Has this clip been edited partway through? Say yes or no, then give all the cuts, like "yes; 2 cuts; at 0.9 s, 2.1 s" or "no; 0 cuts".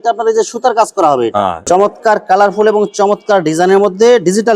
yes; 1 cut; at 1.6 s